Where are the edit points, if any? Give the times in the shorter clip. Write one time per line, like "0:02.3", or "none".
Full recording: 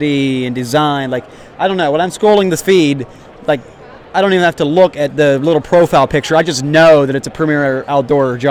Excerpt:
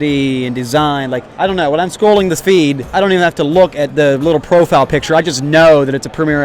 0:01.3
0:02.8

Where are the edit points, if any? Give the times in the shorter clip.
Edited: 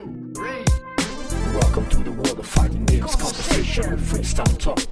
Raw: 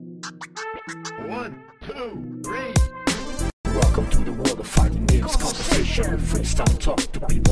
0:01.4

